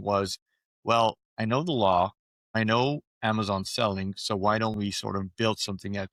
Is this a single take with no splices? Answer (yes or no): yes